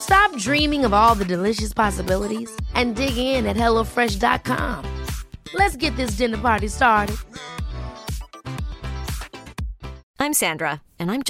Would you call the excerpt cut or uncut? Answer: cut